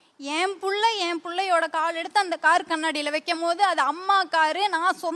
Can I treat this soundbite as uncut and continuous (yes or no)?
yes